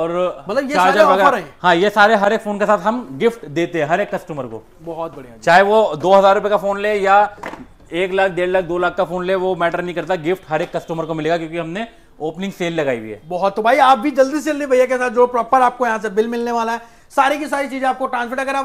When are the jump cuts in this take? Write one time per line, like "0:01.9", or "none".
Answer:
none